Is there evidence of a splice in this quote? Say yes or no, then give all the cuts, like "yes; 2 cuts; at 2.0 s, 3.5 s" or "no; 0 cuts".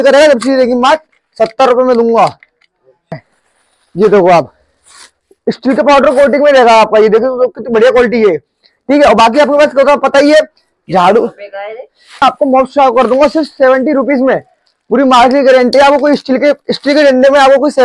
yes; 2 cuts; at 3.2 s, 12.2 s